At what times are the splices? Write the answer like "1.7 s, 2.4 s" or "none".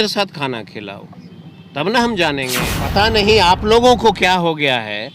2.7 s

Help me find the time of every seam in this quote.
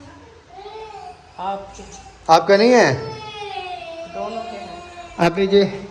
none

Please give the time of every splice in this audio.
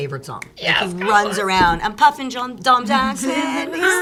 none

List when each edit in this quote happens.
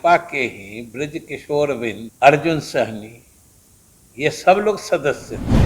2.1 s

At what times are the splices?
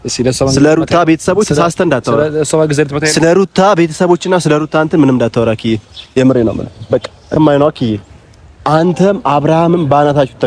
7.2 s

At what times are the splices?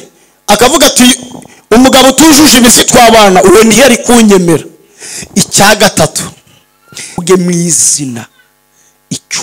7.2 s

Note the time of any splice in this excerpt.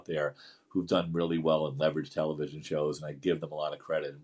none

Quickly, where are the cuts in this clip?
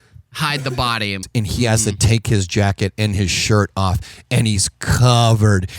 1.2 s

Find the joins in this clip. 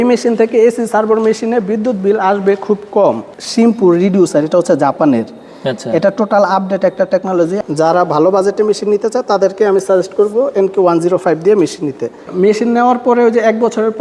3.4 s, 7.6 s, 12.3 s

